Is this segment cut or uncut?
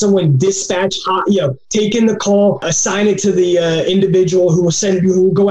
cut